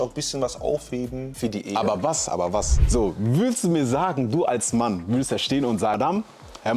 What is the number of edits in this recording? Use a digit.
3